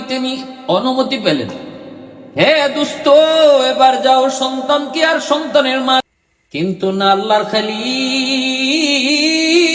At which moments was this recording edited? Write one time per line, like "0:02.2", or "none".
0:06.1